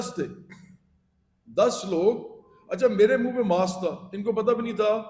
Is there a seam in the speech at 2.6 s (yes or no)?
no